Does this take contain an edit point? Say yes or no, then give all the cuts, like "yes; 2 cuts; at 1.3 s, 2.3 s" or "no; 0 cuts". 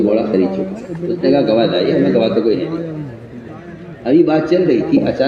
no; 0 cuts